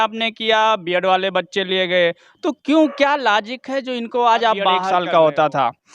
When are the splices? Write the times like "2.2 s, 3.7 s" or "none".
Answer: 4.9 s